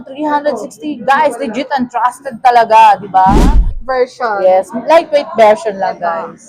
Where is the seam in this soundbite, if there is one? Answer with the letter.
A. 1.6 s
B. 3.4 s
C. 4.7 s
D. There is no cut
B